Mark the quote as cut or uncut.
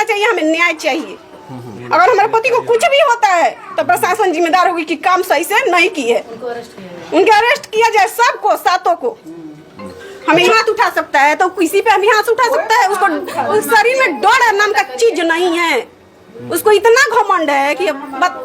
cut